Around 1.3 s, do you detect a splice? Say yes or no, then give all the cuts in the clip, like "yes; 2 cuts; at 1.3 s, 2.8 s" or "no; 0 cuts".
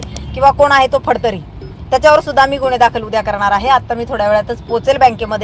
no; 0 cuts